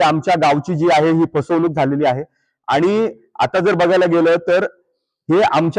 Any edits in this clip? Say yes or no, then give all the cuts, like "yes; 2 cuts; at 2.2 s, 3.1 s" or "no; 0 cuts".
no; 0 cuts